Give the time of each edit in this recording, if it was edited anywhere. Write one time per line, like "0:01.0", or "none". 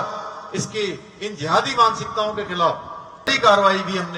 0:03.3

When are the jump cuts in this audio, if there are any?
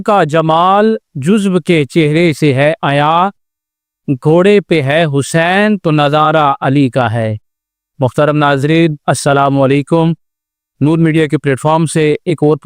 none

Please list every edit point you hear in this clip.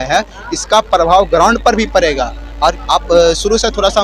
0:02.8

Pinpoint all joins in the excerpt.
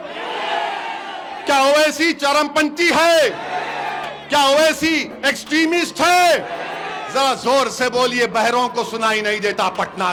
none

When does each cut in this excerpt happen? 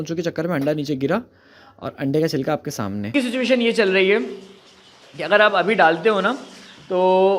0:03.1

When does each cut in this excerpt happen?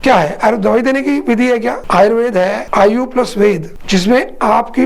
0:01.8
0:02.6
0:03.7

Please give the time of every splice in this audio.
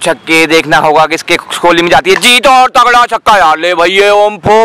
none

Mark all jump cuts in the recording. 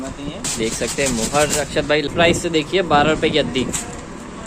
0:02.1

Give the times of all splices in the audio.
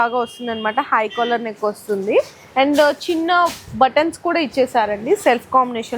none

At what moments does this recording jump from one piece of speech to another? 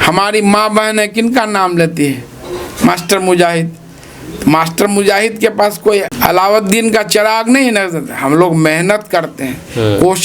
0:06.1

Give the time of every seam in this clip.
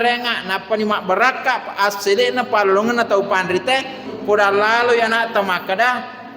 0:04.1

